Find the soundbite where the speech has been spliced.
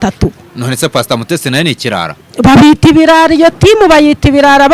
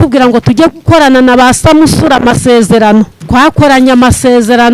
second; 1 cut; at 3.2 s

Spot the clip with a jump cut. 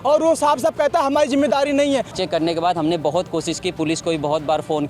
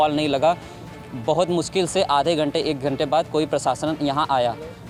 first; 1 cut; at 2.1 s

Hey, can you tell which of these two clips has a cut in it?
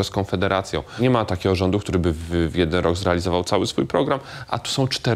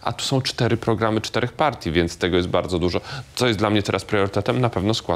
first; 1 cut; at 1.0 s

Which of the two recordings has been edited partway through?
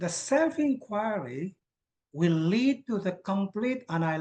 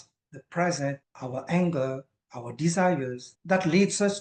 second; 2 cuts; at 1.1 s, 3.3 s

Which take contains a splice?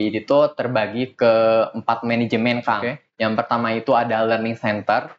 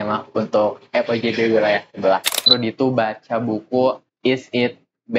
second; 2 cuts; at 2.5 s, 4.1 s

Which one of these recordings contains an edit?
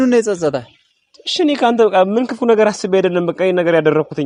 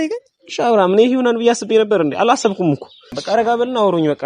second; 1 cut; at 3.2 s

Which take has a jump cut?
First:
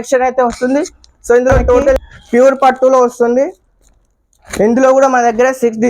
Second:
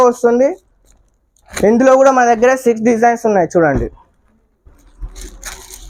first; 1 cut; at 2.0 s

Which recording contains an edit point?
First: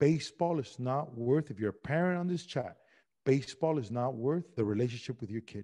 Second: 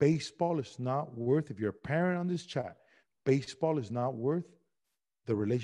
first; 1 cut; at 4.5 s

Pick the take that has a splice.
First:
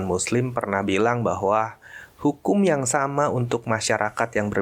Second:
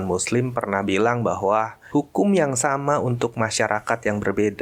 second; 1 cut; at 1.8 s

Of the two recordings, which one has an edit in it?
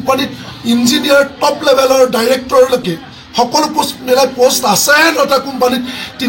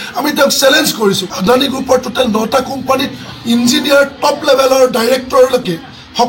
second; 1 cut; at 1.3 s

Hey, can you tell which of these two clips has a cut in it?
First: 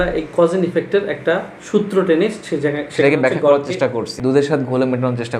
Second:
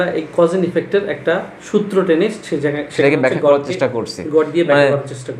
first; 1 cut; at 4.1 s

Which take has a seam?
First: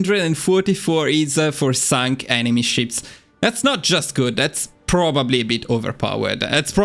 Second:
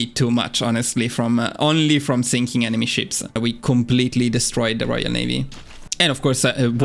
second; 1 cut; at 3.4 s

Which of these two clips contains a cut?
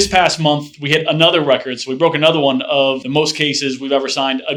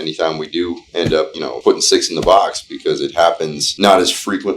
second; 2 cuts; at 1.4 s, 3.6 s

